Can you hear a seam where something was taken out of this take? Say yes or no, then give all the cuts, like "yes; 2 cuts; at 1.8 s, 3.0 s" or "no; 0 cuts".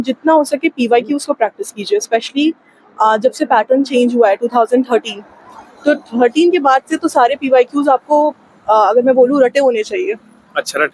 no; 0 cuts